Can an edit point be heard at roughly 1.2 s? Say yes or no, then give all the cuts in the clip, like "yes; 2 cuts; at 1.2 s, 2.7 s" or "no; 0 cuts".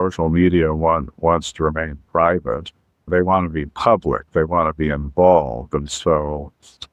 no; 1 cut; at 3.1 s